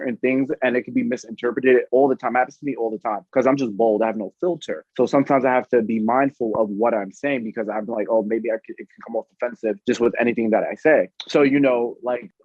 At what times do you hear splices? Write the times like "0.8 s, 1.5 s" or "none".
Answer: 4.8 s